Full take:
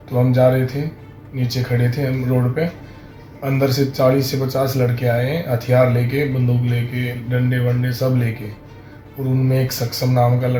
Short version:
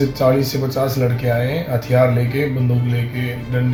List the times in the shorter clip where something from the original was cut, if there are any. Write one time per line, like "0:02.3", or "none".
none

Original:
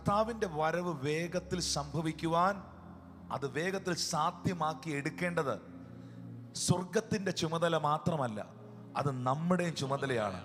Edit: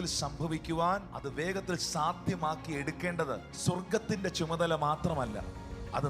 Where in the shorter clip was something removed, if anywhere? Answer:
0:01.2
0:03.5

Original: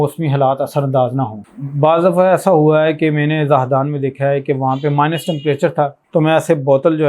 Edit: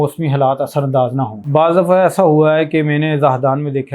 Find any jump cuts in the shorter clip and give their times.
0:01.4

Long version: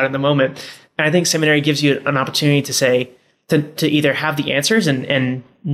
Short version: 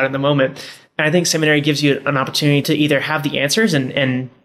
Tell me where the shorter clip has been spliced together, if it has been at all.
0:02.6

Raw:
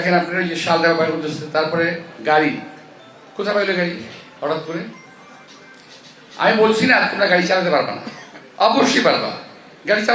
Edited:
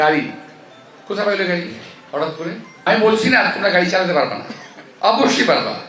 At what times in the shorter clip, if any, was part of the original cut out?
0:02.9

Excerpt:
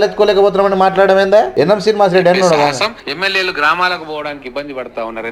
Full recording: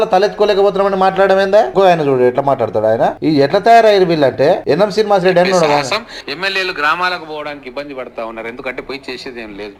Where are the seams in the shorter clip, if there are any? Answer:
0:01.5
0:03.0

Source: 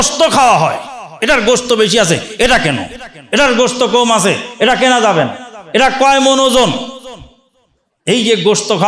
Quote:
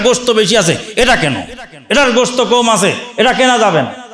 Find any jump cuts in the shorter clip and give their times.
none

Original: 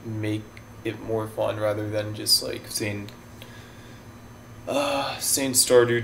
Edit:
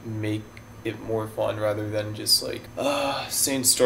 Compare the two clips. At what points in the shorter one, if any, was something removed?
0:02.7

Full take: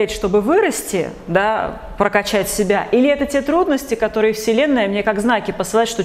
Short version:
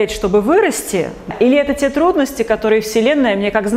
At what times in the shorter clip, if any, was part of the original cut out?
0:01.3

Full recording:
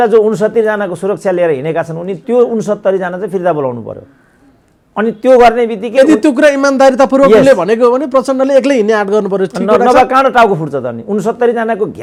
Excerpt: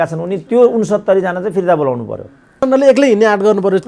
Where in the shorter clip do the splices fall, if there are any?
0:02.6

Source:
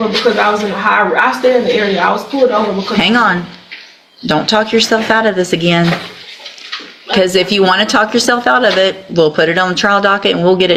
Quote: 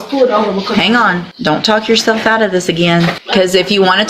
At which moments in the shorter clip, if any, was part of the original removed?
0:01.3
0:03.2

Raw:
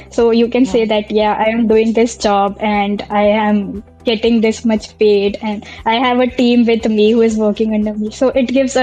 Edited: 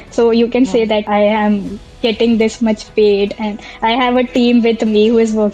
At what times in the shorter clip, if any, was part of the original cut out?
0:01.0

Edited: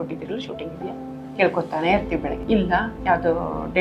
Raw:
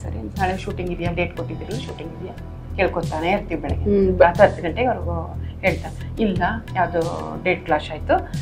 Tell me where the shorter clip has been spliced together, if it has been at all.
0:02.3

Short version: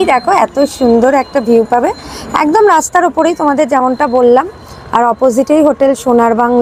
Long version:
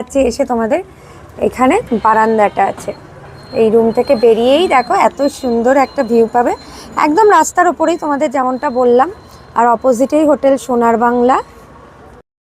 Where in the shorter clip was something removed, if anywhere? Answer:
none

